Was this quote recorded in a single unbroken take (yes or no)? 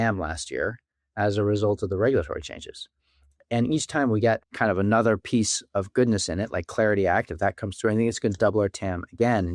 no